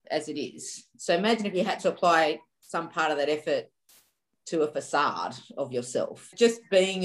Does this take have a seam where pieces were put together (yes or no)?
no